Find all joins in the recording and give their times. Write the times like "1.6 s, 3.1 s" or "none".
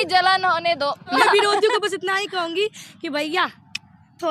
1.2 s